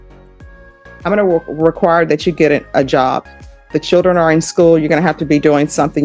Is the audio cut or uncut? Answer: cut